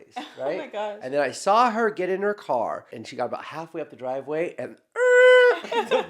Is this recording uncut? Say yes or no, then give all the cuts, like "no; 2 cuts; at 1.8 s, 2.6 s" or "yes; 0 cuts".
no; 1 cut; at 3.0 s